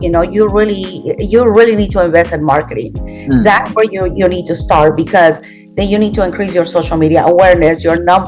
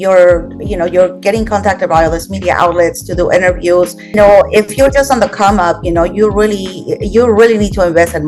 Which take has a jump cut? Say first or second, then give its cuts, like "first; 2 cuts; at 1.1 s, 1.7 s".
second; 1 cut; at 4.1 s